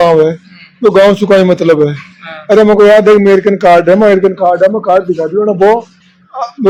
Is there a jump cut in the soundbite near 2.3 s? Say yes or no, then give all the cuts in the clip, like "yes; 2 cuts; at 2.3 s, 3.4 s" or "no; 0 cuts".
no; 0 cuts